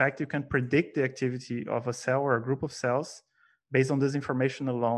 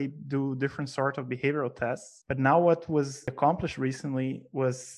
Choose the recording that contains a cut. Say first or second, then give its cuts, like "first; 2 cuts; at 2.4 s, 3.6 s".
second; 2 cuts; at 2.1 s, 3.3 s